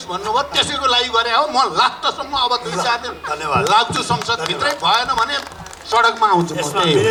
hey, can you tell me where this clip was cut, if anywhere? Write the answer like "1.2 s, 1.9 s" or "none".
none